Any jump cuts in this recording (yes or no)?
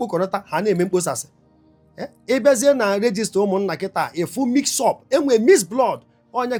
no